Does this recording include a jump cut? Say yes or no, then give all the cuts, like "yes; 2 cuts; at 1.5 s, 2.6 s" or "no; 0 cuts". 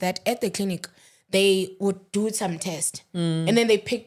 no; 0 cuts